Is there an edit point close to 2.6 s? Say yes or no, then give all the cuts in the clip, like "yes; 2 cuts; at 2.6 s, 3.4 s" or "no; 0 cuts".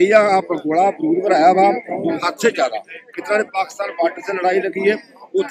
no; 0 cuts